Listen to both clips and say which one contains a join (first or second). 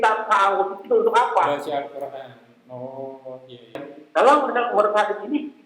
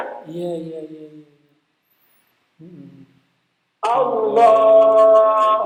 first